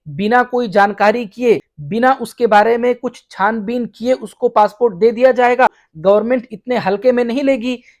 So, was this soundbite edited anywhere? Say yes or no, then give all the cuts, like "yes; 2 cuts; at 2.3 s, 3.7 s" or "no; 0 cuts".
yes; 2 cuts; at 1.8 s, 5.9 s